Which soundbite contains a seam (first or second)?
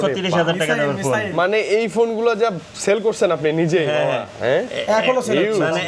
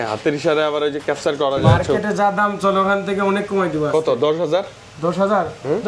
second